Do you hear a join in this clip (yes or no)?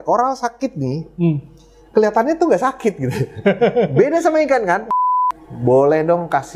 yes